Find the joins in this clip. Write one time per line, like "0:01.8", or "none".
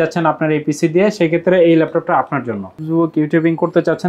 0:02.8

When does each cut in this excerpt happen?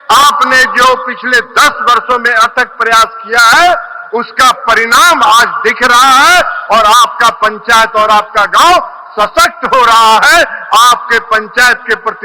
none

